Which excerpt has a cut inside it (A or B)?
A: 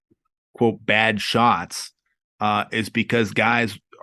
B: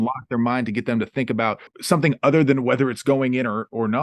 B